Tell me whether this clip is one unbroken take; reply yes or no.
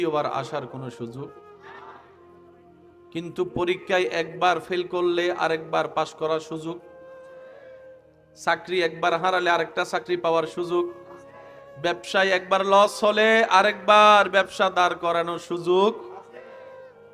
yes